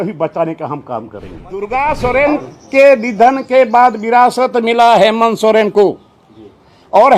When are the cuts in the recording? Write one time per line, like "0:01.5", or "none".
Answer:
0:01.7